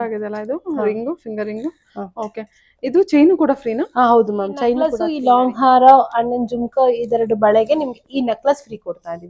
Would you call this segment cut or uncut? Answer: cut